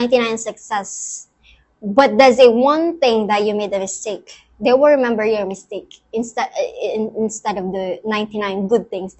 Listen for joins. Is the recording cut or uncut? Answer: uncut